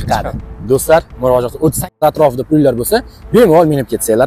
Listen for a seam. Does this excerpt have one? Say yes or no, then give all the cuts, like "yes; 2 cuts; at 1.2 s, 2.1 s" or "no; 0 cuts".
yes; 1 cut; at 2.0 s